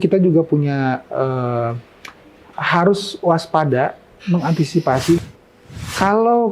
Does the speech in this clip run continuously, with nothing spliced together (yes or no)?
no